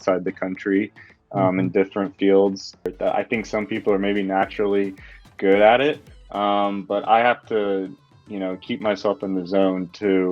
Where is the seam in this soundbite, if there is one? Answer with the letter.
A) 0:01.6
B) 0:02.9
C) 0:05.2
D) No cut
B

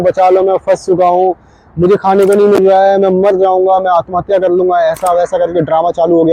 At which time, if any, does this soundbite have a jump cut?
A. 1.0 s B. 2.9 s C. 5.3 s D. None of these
D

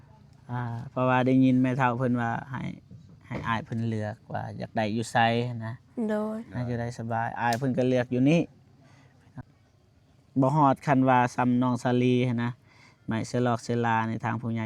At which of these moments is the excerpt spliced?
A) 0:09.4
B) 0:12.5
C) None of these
A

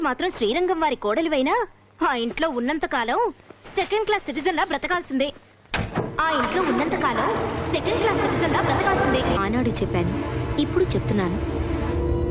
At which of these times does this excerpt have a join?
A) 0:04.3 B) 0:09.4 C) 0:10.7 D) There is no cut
B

